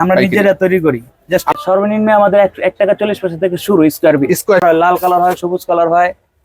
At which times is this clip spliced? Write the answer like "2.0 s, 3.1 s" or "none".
1.5 s, 4.6 s

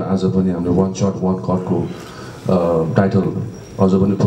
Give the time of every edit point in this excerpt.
none

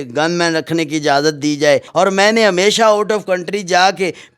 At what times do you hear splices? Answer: 1.9 s

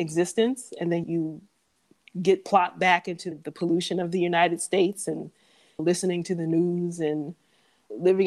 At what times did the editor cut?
1.0 s, 3.3 s

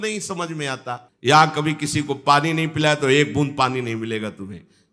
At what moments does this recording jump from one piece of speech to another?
1.0 s

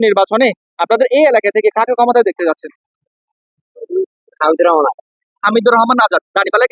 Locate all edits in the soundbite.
none

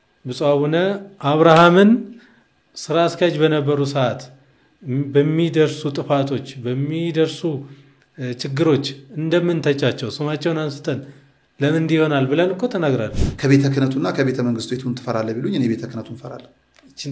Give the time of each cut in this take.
13.1 s

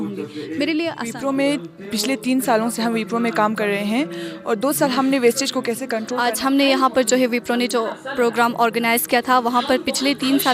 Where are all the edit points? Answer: 1.1 s, 6.1 s

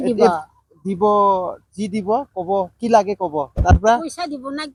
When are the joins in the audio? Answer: none

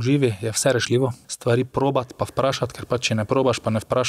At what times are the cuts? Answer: 1.3 s

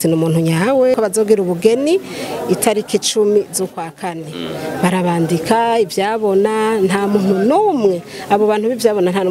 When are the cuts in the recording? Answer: 0.9 s

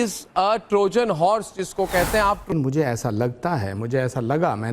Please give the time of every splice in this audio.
2.5 s

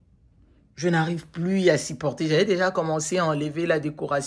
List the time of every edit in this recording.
none

